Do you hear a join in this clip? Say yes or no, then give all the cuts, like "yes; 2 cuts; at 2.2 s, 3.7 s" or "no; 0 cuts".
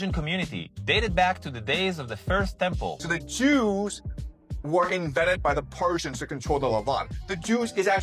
yes; 1 cut; at 3.0 s